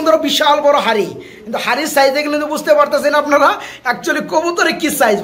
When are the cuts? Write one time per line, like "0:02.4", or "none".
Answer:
none